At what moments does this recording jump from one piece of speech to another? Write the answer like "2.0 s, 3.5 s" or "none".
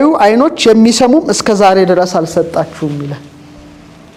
none